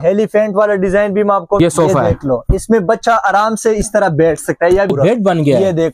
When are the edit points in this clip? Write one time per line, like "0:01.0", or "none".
0:01.6
0:04.9